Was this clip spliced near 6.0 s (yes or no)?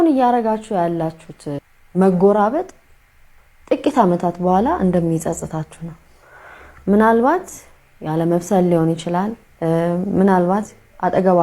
no